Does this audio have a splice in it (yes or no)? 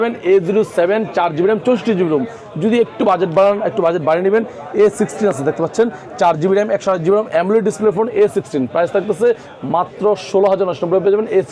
no